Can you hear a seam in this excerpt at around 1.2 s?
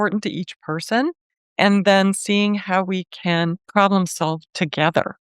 no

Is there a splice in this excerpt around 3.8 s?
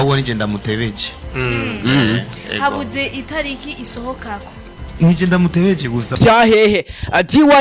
no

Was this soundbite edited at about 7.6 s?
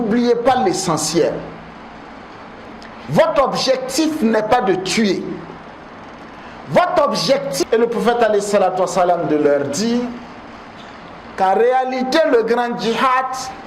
yes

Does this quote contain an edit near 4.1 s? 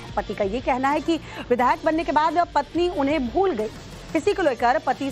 no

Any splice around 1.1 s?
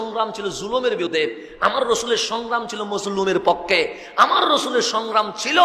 yes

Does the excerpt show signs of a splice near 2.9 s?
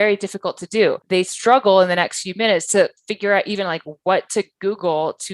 no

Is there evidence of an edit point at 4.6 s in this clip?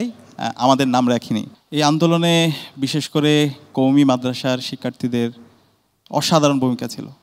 no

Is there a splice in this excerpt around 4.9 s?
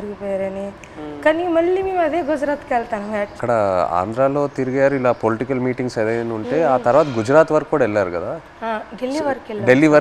no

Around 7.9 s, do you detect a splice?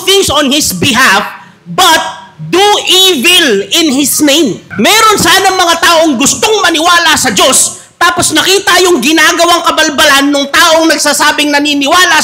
no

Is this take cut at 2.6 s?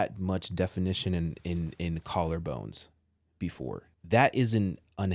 no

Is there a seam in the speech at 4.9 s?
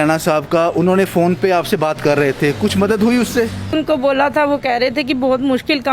no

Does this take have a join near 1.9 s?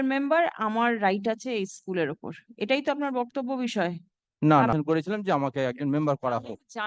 no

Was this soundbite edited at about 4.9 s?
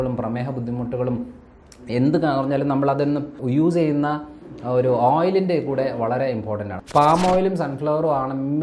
no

